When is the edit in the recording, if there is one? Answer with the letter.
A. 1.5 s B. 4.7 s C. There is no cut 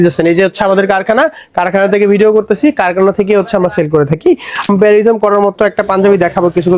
B